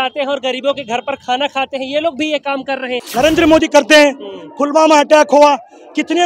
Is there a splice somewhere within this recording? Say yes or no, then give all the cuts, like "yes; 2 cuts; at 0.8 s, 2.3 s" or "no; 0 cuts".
yes; 1 cut; at 2.9 s